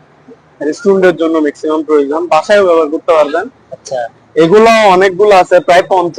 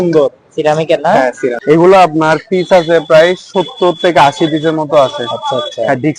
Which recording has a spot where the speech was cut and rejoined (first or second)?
second